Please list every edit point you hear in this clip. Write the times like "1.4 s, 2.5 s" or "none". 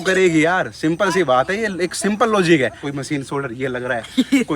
2.9 s